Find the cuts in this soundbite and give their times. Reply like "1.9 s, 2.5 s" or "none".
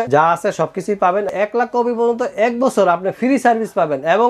1.3 s